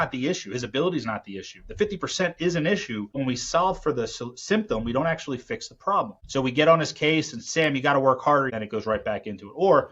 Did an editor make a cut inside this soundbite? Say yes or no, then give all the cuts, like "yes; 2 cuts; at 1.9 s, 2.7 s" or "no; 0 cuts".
yes; 3 cuts; at 3.2 s, 6.2 s, 8.5 s